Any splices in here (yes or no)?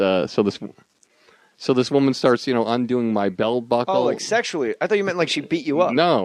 yes